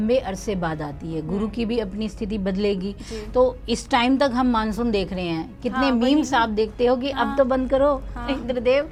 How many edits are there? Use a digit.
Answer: 0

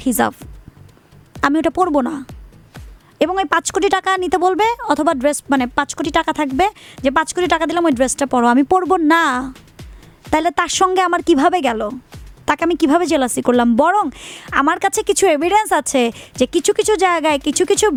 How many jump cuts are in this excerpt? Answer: 0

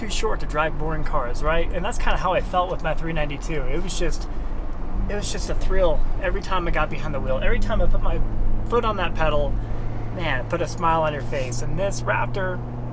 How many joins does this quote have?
0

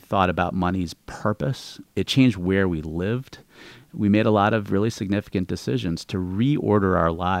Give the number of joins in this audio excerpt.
1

